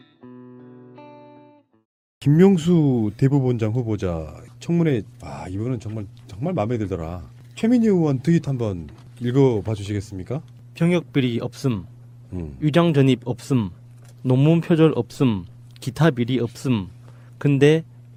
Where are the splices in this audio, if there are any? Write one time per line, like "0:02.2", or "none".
none